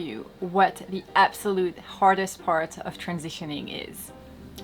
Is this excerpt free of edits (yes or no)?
yes